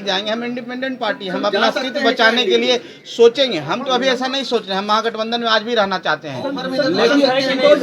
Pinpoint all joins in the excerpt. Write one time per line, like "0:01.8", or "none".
none